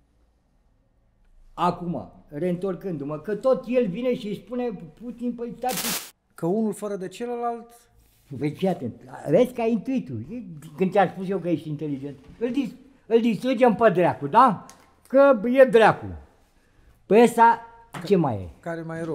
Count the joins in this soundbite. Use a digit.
1